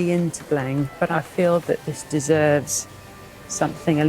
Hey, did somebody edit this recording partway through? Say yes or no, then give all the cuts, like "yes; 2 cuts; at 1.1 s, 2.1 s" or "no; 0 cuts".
yes; 1 cut; at 1.1 s